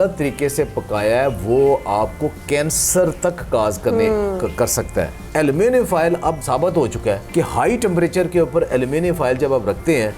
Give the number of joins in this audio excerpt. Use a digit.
3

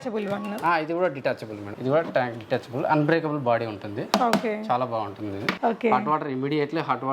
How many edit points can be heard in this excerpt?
2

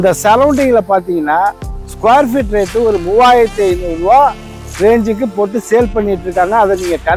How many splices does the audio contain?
0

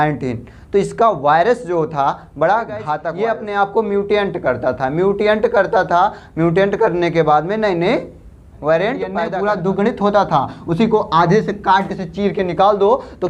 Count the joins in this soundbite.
2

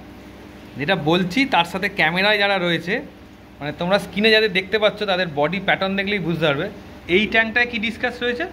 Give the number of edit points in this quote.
1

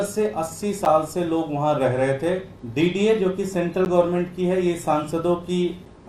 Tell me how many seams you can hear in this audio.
1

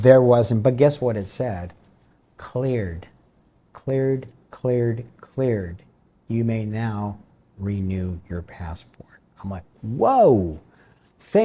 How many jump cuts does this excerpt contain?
0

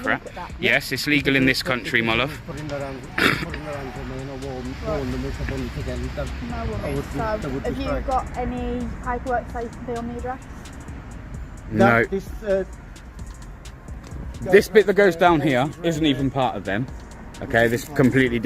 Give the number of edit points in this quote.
0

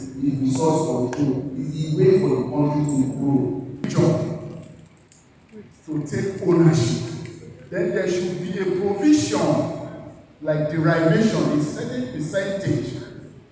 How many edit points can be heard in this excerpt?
1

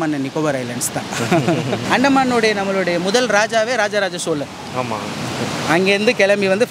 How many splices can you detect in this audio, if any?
1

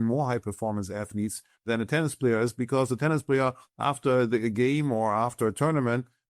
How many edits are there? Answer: 1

